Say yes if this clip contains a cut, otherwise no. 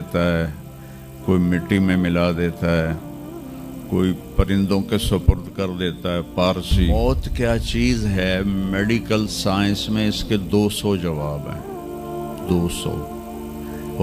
yes